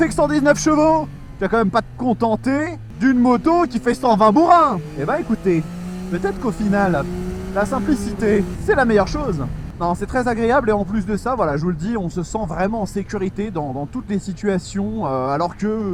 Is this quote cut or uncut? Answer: uncut